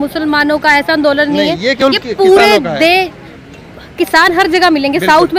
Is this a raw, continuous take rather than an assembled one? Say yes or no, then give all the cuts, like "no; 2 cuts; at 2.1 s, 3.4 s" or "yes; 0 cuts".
yes; 0 cuts